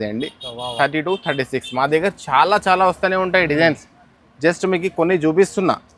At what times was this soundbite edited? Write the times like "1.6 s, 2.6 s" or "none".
none